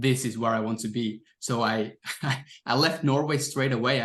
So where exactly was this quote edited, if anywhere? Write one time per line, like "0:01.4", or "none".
none